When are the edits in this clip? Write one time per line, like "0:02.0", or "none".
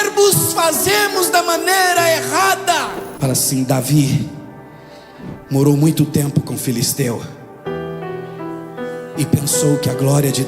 0:03.0

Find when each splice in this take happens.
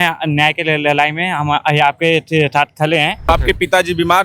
0:03.3

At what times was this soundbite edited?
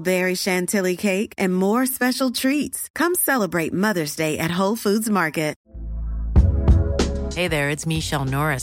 0:05.6

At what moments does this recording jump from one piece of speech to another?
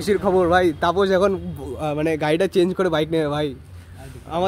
none

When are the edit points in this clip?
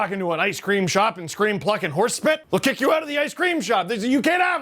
0:02.4

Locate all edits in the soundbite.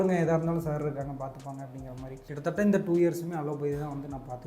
0:02.3

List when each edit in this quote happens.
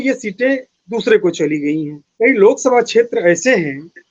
0:02.1

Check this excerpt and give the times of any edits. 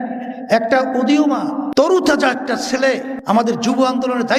0:01.9
0:03.1

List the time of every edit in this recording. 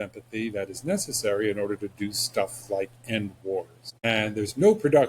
0:03.8

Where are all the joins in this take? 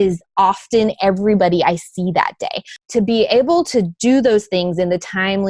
0:02.8

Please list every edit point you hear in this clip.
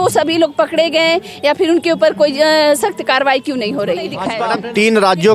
0:04.3

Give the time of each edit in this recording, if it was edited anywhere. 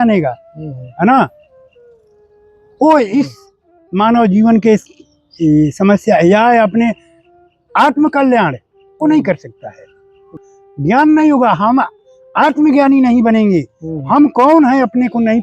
0:10.4

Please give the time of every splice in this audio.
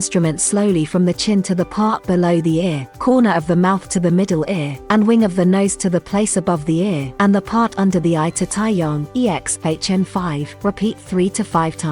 0:02.9
0:04.7
0:07.1
0:09.0
0:10.5

